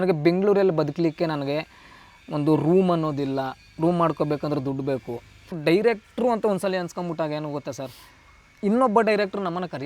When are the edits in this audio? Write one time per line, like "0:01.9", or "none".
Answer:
0:05.6